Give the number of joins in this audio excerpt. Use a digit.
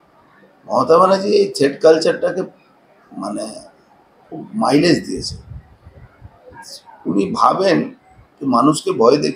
0